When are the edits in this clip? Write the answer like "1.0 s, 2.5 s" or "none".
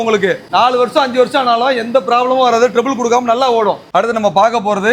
none